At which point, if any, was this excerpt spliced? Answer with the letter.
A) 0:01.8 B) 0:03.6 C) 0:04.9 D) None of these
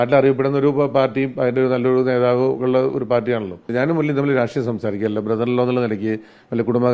B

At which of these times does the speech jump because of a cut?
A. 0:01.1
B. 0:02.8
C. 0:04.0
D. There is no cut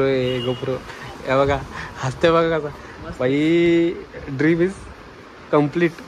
D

